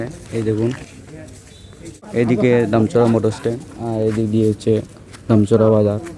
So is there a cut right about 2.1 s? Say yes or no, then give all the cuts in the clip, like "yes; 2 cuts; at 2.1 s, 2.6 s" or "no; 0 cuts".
yes; 1 cut; at 2.1 s